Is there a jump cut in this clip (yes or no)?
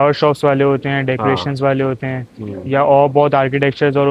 no